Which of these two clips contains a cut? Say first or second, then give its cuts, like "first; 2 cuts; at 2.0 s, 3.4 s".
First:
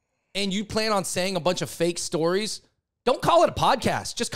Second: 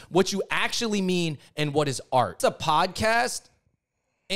second; 1 cut; at 2.3 s